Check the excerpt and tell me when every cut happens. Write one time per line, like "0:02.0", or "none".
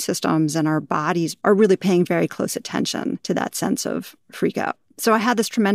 0:01.3
0:03.2
0:04.9